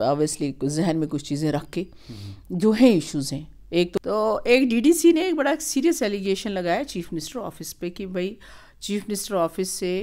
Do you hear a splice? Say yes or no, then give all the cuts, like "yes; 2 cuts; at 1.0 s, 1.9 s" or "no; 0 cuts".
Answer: yes; 1 cut; at 4.0 s